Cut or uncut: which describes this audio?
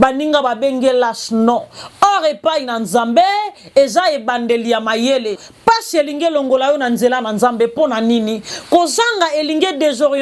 cut